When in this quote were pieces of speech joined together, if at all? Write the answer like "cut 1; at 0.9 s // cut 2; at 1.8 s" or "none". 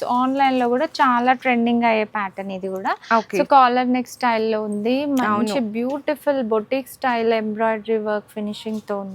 none

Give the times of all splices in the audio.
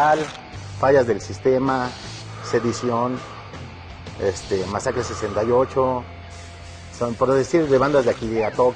none

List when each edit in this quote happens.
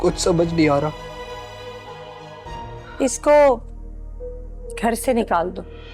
cut 1; at 2.8 s

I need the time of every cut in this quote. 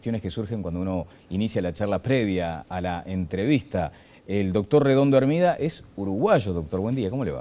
none

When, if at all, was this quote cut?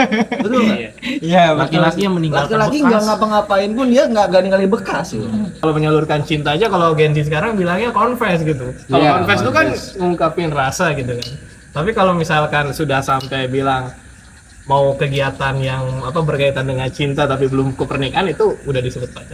cut 1; at 5.5 s

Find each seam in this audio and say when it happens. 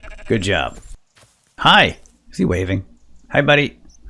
cut 1; at 0.9 s

